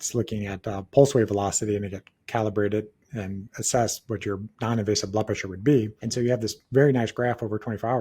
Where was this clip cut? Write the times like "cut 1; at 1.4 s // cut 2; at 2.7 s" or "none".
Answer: cut 1; at 4.5 s // cut 2; at 6.0 s